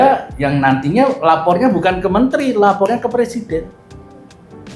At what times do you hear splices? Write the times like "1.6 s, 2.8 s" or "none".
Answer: none